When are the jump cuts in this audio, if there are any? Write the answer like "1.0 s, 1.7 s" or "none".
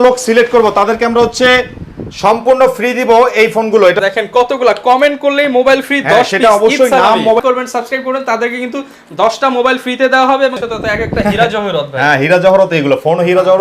4.0 s, 7.4 s, 10.6 s

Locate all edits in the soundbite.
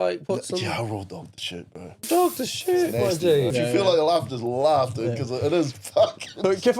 2.1 s, 3.5 s

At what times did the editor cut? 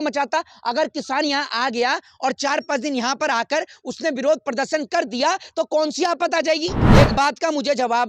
6.8 s

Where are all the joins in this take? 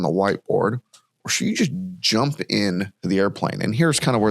3.0 s

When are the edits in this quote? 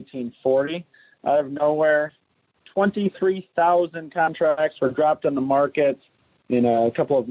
none

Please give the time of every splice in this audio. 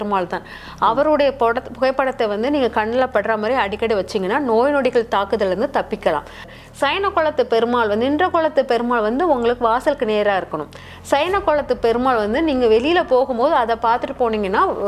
6.5 s

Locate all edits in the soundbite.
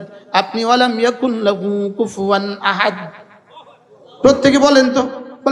none

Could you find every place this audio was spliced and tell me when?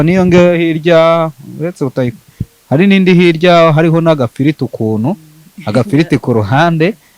none

